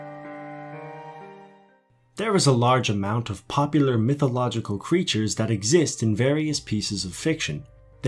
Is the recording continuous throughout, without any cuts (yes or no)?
yes